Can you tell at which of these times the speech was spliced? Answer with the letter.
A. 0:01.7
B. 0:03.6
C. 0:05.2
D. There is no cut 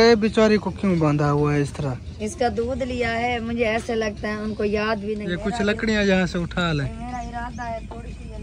C